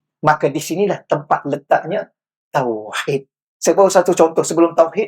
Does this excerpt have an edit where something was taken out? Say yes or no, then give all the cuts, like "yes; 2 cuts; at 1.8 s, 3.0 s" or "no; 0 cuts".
yes; 1 cut; at 3.4 s